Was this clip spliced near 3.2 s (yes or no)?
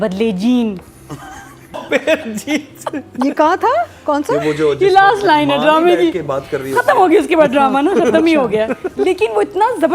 no